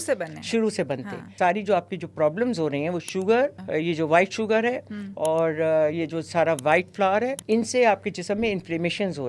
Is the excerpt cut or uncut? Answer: cut